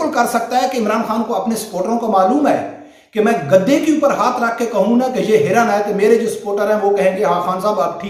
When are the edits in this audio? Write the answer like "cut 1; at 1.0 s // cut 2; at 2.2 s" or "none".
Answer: none